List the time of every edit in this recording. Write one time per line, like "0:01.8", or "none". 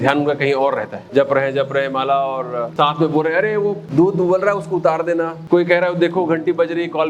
0:01.0
0:02.7
0:03.8
0:05.4